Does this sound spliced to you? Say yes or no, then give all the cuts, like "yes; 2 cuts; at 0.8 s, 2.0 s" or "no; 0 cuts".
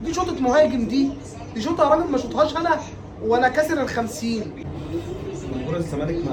no; 0 cuts